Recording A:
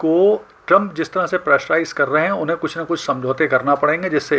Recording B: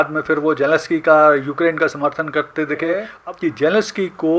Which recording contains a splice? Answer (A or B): B